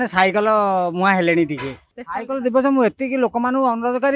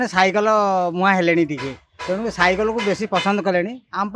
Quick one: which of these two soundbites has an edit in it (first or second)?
first